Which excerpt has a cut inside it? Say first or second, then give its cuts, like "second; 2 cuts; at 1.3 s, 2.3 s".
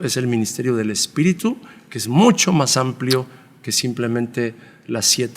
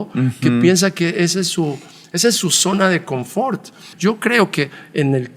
second; 1 cut; at 3.9 s